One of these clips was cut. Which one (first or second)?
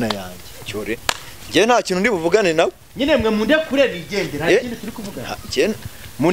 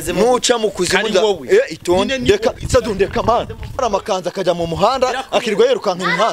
second